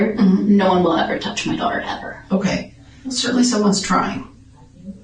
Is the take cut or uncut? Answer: cut